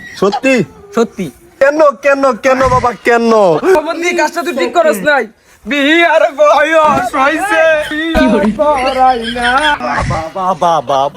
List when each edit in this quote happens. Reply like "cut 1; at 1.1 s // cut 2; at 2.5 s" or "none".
cut 1; at 1.5 s // cut 2; at 3.8 s // cut 3; at 7.9 s // cut 4; at 9.7 s